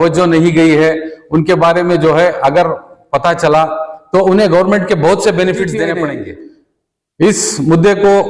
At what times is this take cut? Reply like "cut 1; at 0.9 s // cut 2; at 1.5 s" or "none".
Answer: cut 1; at 6.0 s